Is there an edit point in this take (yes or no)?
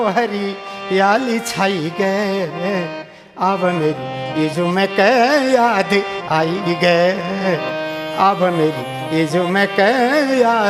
no